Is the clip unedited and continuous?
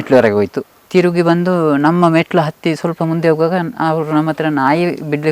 yes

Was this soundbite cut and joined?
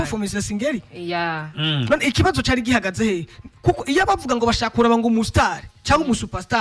no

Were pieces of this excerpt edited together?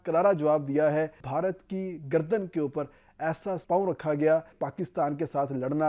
yes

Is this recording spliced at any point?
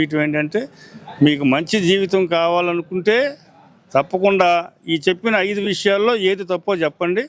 no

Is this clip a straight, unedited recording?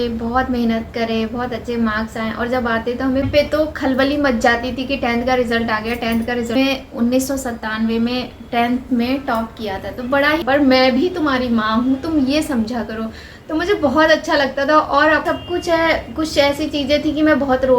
no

